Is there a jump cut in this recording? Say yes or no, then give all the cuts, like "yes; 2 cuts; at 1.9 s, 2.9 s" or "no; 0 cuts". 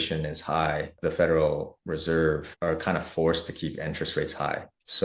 yes; 1 cut; at 0.9 s